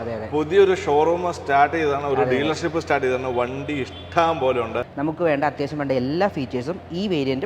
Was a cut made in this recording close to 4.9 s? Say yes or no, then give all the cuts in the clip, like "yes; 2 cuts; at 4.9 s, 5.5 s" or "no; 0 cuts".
yes; 1 cut; at 4.9 s